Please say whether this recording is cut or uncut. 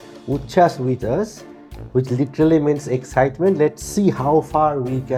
uncut